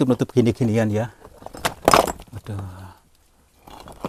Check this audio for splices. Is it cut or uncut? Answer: uncut